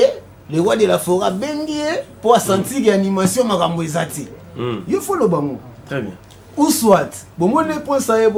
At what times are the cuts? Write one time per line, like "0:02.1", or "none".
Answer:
none

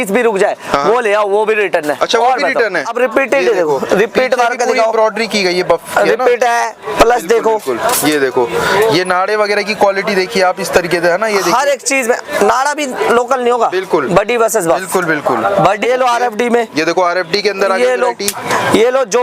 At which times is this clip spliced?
0:02.9
0:15.8

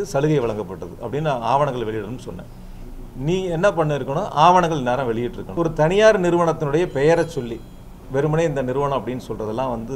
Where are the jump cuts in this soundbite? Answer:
0:05.4

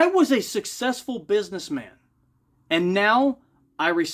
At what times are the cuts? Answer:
none

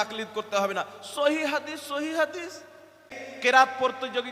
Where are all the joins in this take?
0:03.2

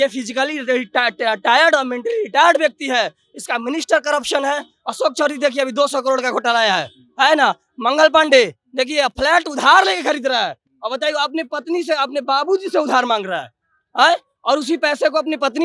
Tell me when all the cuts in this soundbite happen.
none

